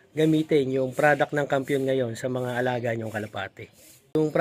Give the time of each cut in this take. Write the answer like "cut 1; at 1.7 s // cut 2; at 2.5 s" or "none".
none